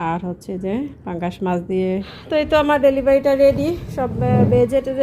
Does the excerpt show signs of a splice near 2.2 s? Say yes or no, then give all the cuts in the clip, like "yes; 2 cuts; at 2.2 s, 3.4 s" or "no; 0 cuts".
yes; 1 cut; at 2.2 s